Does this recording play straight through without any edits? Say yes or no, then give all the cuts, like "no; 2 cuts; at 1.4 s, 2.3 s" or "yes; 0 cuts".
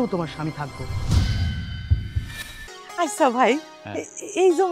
no; 1 cut; at 2.8 s